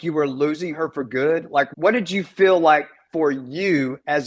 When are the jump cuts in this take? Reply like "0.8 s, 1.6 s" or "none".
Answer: none